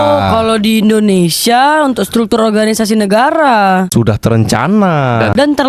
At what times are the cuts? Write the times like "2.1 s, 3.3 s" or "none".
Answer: none